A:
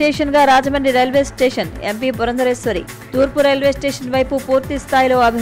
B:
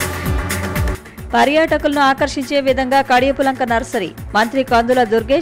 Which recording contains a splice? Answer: B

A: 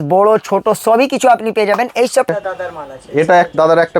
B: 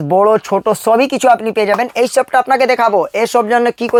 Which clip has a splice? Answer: A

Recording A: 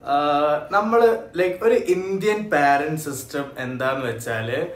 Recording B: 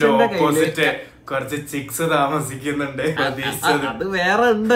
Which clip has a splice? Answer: B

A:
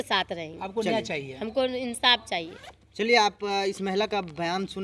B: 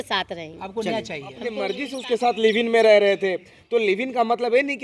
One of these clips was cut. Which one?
B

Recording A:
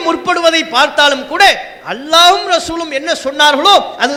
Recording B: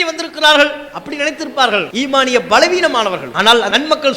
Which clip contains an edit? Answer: B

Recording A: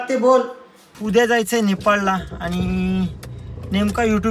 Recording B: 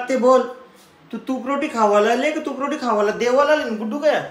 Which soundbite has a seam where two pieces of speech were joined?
A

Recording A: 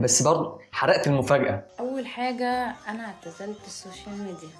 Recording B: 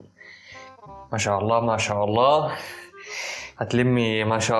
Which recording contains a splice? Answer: A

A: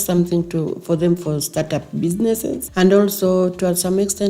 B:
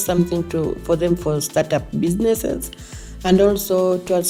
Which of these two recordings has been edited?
A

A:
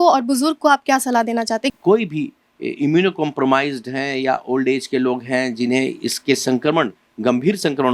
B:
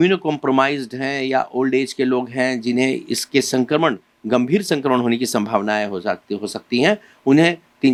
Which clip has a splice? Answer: A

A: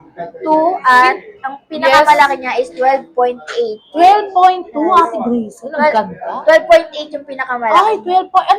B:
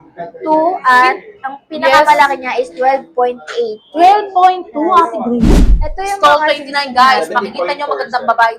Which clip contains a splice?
B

